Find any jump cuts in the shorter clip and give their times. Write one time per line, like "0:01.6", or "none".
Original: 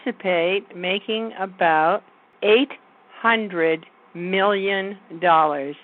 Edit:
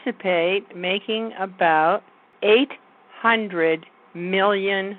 none